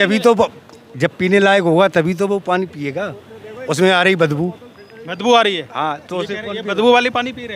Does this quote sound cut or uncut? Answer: uncut